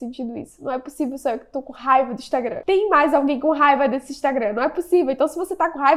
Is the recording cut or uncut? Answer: uncut